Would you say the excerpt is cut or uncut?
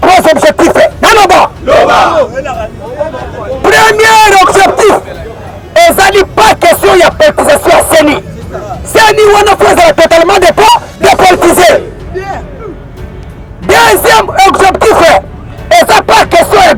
uncut